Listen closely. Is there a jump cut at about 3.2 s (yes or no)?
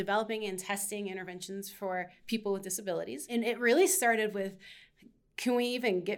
yes